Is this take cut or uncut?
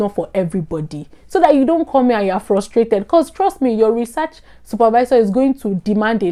uncut